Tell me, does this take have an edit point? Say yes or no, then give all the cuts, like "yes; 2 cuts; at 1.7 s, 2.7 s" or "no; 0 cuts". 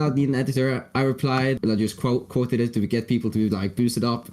yes; 1 cut; at 1.6 s